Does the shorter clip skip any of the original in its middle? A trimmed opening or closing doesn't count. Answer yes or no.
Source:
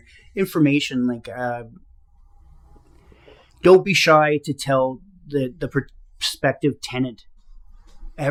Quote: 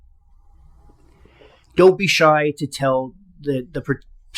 no